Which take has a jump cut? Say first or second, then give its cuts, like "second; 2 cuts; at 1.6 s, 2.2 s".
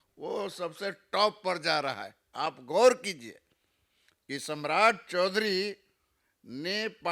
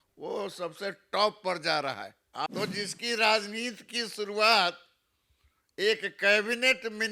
second; 1 cut; at 2.5 s